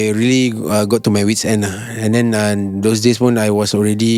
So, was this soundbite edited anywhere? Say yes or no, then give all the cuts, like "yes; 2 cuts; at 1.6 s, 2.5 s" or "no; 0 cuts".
no; 0 cuts